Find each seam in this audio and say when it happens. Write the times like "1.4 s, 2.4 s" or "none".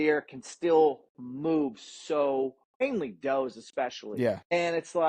2.8 s, 4.0 s